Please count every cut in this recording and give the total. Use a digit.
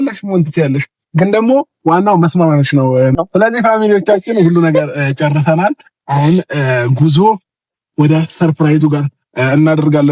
1